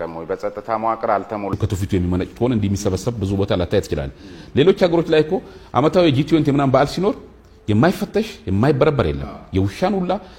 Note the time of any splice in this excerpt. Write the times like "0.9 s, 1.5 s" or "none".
1.5 s